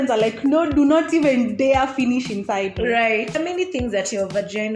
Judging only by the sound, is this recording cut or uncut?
cut